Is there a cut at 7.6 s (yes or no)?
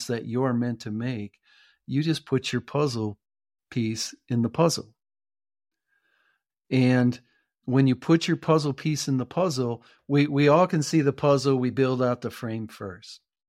yes